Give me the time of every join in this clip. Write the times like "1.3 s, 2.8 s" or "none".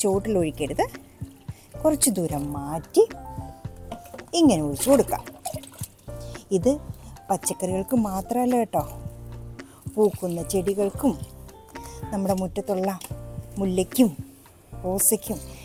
none